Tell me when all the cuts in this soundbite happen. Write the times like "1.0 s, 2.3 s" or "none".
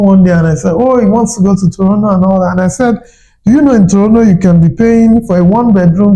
none

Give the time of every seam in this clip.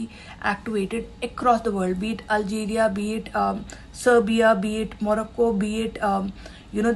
none

